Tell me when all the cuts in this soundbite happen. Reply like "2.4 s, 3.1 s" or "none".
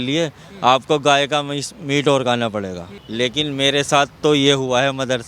3.0 s